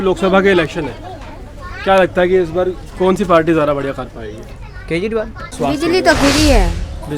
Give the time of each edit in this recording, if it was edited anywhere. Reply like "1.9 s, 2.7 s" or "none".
5.5 s

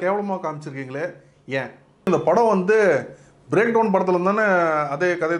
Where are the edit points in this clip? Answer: 2.1 s

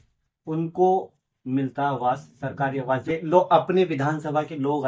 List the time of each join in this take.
1.2 s, 3.0 s

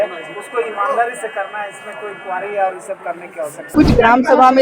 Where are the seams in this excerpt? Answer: 3.6 s

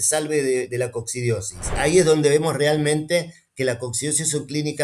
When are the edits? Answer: 1.7 s

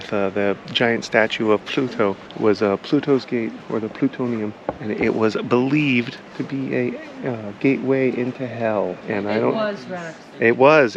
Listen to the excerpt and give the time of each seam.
2.3 s, 4.7 s

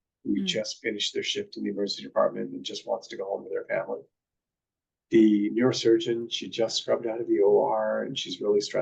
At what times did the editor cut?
none

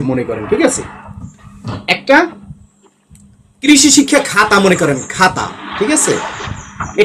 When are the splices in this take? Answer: none

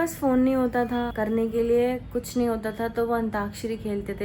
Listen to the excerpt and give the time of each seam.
none

